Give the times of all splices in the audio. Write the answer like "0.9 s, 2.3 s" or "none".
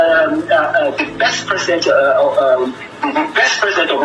none